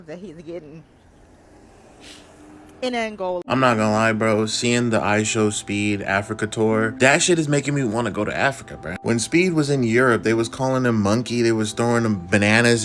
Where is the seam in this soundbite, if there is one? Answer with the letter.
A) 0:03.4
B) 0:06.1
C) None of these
A